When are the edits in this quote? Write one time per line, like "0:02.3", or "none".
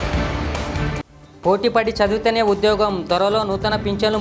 0:01.1